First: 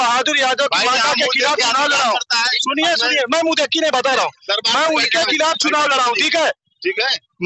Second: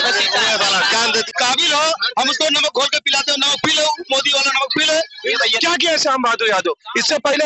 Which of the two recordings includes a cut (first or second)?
second